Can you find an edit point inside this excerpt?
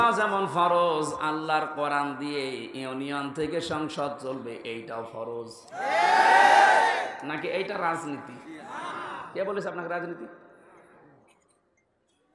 no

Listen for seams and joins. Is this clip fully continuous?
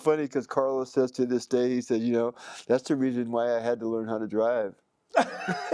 yes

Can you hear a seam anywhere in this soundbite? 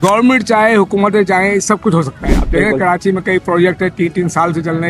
no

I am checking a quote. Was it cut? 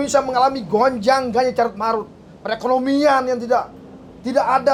no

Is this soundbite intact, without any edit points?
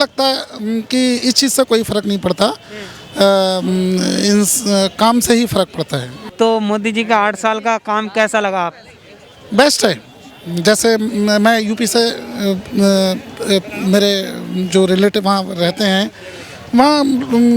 no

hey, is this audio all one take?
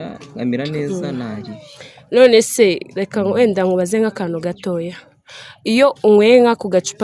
yes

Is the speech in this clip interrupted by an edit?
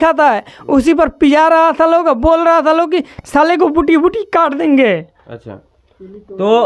no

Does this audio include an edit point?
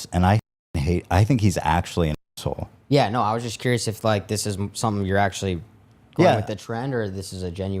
yes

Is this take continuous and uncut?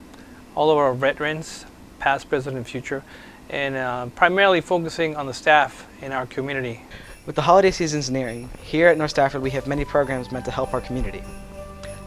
no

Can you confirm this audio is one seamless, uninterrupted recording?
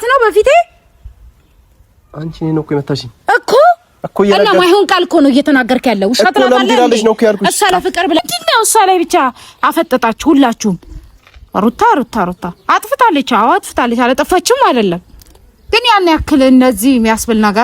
no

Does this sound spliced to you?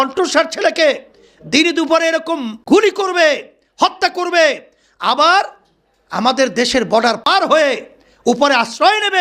yes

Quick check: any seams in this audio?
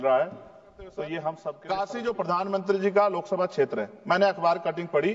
yes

